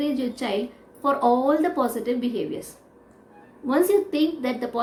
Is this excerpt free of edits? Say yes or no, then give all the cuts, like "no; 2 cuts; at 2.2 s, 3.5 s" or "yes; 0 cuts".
yes; 0 cuts